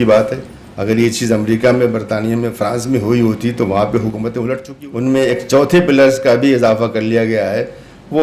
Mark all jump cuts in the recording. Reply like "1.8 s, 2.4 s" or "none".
4.7 s